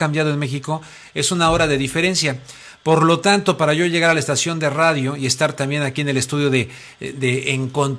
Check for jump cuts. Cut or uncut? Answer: uncut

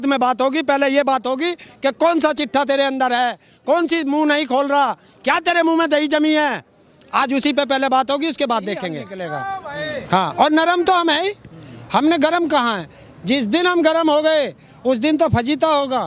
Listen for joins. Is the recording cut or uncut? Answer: cut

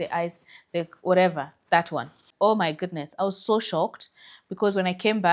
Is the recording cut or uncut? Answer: cut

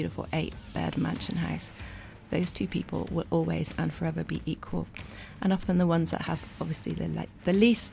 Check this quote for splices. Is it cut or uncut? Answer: uncut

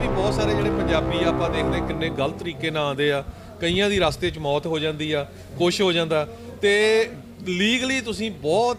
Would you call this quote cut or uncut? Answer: uncut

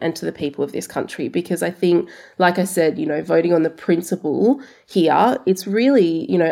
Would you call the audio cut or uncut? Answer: uncut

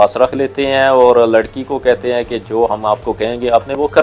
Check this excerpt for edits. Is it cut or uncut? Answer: uncut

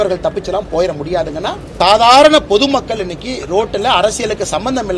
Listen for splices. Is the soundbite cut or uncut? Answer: cut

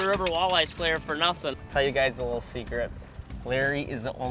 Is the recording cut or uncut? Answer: cut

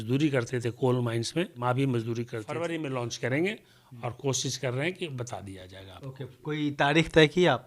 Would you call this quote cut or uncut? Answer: cut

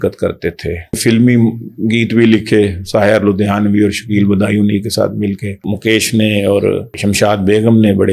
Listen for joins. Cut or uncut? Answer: cut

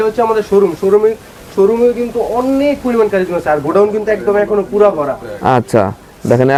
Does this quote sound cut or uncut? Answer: uncut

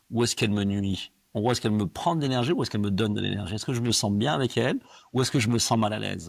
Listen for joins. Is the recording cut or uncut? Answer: uncut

